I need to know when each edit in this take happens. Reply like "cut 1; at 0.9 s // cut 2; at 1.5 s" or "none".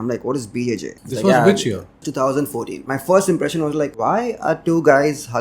cut 1; at 1.0 s // cut 2; at 2.1 s // cut 3; at 2.8 s // cut 4; at 3.9 s